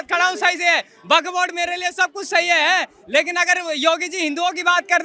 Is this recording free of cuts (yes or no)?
yes